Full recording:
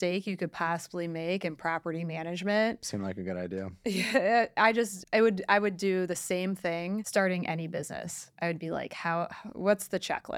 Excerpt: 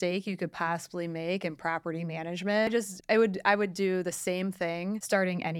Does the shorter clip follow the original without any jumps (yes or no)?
no